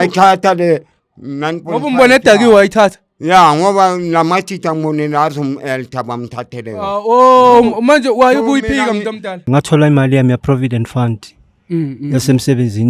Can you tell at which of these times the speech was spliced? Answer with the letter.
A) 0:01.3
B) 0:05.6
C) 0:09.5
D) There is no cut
C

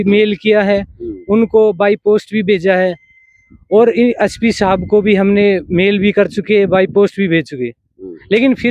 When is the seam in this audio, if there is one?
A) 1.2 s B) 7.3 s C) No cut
C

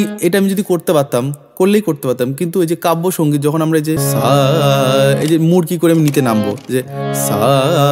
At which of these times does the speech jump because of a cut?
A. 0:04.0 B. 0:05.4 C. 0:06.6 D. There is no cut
A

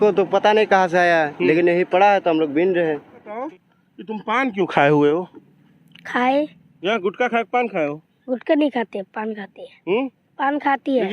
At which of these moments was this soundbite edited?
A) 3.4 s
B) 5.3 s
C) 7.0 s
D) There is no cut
A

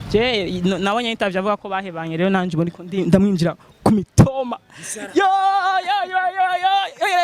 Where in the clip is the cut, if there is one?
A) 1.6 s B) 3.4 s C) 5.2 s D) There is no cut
D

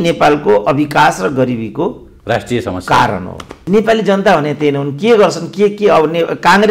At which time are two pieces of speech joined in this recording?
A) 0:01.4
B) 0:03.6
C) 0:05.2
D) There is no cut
B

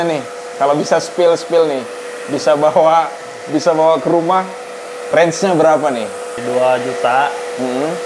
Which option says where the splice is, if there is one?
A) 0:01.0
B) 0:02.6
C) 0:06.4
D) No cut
C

